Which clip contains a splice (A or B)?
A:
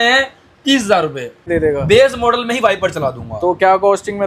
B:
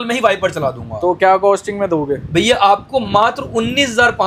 A